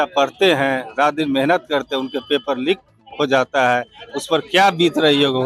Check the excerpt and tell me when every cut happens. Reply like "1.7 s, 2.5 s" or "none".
none